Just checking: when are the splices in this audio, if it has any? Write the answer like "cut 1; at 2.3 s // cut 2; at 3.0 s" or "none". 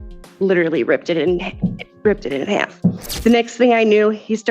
cut 1; at 3.1 s